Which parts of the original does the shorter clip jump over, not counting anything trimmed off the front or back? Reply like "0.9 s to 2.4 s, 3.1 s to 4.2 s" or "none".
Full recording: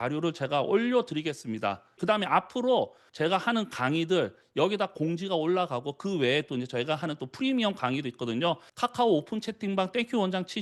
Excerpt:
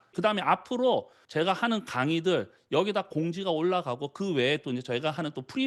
none